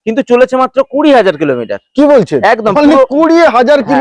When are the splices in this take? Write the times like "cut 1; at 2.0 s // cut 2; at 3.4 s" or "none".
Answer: none

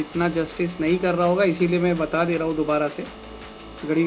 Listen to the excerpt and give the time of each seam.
none

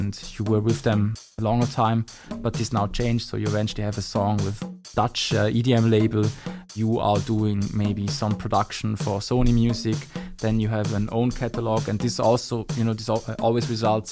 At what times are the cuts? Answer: cut 1; at 1.2 s // cut 2; at 4.7 s // cut 3; at 6.7 s

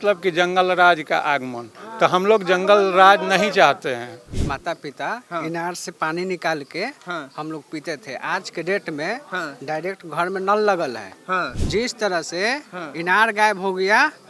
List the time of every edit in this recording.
cut 1; at 4.3 s // cut 2; at 11.6 s

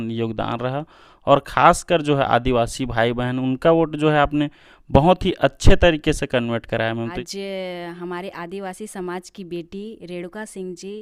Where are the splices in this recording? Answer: cut 1; at 7.1 s

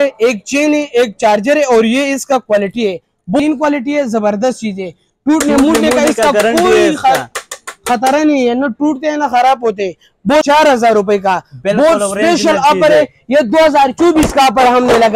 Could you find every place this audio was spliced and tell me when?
cut 1; at 3.4 s // cut 2; at 10.4 s

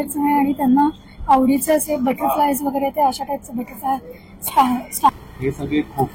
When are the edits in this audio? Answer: cut 1; at 5.1 s

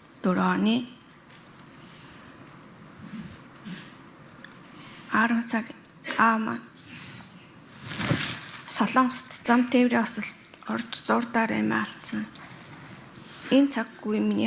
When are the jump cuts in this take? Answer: cut 1; at 7.8 s

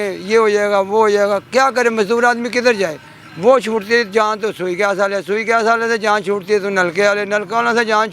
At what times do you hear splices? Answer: none

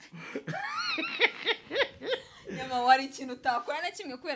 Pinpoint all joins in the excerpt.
none

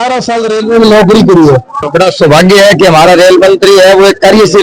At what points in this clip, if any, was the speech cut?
cut 1; at 1.9 s

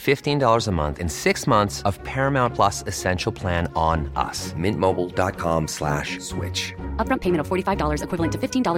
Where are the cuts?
none

